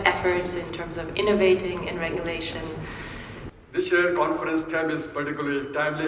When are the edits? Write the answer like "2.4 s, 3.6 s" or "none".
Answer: 3.5 s